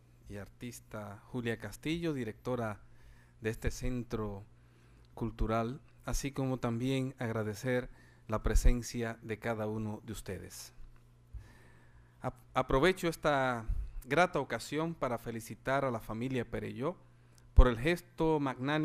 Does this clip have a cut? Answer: no; 0 cuts

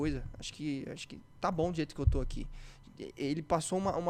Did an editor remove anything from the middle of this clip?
no; 0 cuts

